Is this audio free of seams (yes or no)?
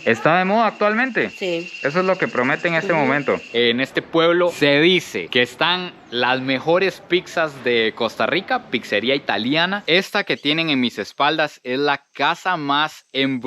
no